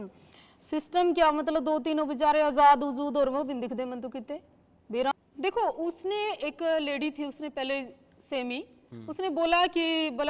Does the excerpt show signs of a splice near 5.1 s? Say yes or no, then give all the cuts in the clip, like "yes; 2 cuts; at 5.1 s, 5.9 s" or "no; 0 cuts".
yes; 1 cut; at 5.1 s